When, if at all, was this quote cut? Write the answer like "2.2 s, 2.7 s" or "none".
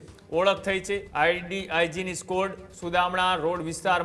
1.1 s